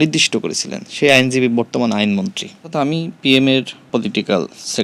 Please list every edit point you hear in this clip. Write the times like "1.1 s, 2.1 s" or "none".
2.7 s, 3.9 s